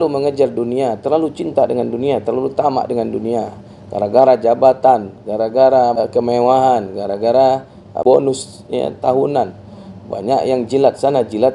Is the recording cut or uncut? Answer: cut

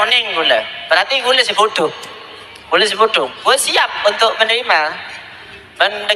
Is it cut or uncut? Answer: uncut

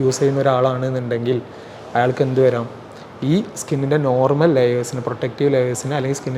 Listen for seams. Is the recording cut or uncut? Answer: uncut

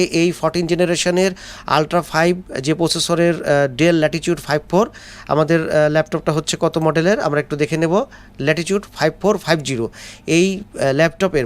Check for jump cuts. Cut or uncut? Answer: uncut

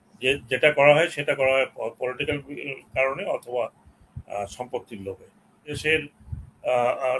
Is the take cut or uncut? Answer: cut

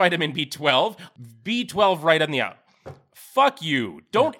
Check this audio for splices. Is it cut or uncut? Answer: cut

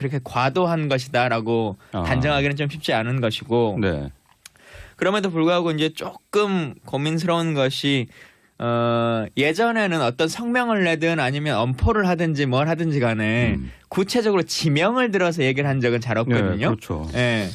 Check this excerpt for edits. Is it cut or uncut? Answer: cut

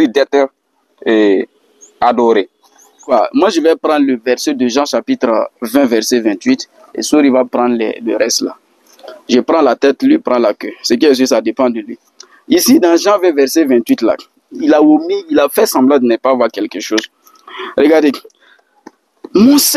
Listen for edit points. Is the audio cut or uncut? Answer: cut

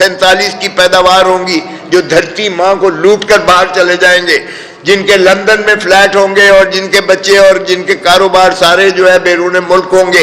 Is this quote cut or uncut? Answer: uncut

